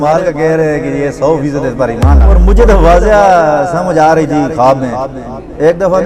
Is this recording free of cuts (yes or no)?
no